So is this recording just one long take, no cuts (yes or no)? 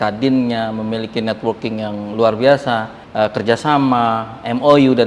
no